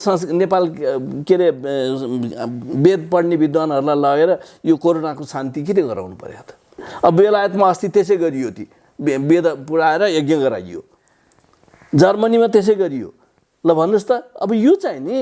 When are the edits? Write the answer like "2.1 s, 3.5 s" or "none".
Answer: 6.9 s